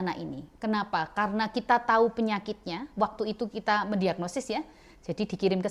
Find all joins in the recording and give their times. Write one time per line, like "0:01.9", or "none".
none